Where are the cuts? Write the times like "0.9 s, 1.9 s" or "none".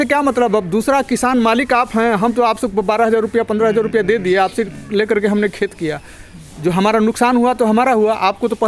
none